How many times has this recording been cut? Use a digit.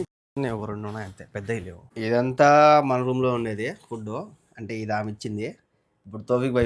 1